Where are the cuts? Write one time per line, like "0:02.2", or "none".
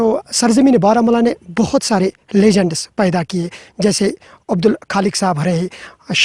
none